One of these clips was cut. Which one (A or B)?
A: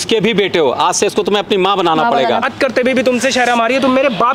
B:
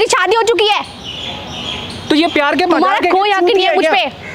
A